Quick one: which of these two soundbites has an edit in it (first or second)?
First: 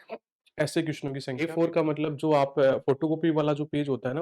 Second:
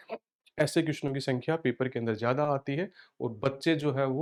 first